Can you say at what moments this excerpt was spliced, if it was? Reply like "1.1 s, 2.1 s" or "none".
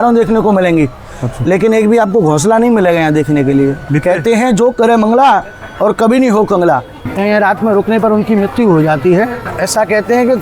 3.8 s, 7.1 s, 9.4 s